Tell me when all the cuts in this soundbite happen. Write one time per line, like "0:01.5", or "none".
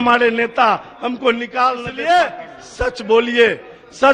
0:01.9